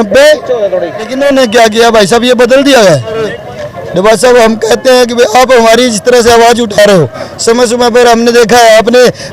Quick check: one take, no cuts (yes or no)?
no